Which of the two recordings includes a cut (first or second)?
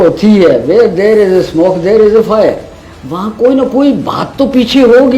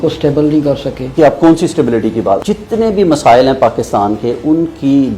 second